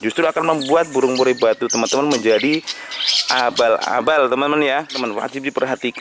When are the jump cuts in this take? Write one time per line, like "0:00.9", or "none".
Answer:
0:05.0